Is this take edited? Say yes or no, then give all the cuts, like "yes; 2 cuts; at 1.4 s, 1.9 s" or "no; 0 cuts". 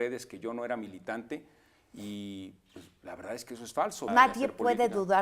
yes; 1 cut; at 4.1 s